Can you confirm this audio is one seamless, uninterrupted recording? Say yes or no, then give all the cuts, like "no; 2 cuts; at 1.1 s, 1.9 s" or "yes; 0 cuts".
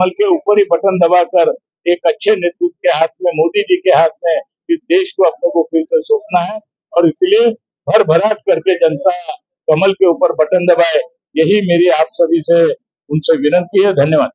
yes; 0 cuts